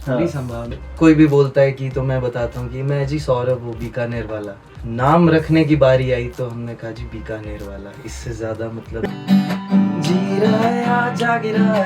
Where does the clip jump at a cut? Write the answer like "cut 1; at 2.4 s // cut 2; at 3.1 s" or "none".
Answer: cut 1; at 0.9 s // cut 2; at 4.7 s // cut 3; at 9.0 s